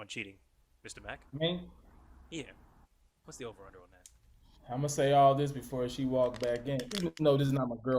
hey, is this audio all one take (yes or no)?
yes